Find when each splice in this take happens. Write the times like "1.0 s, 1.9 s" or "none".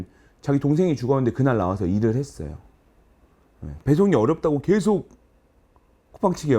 3.8 s